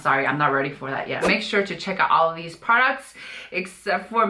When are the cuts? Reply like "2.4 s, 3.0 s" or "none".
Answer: 1.2 s